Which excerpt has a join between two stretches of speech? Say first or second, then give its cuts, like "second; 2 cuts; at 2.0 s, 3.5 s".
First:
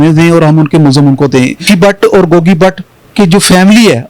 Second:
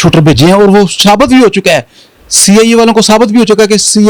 first; 1 cut; at 1.7 s